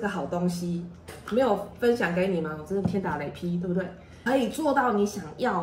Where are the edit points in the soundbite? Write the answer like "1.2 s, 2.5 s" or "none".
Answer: 4.2 s